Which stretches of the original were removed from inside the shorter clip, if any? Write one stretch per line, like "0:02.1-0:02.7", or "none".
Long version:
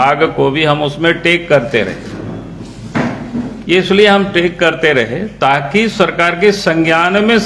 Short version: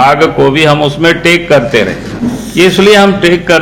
0:02.1-0:03.2